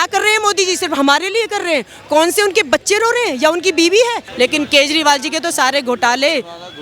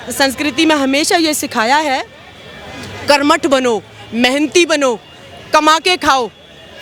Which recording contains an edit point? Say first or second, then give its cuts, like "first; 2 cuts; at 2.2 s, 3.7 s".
first; 1 cut; at 4.2 s